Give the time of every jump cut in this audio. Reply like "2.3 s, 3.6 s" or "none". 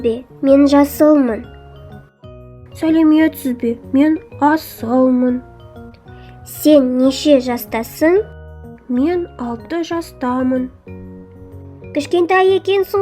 11.2 s